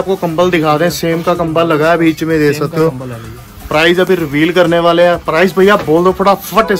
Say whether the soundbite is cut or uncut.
uncut